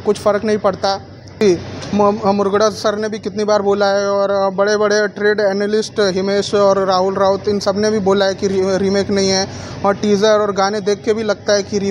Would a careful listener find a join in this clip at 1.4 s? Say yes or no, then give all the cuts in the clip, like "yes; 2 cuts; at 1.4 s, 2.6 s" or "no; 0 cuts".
yes; 1 cut; at 1.4 s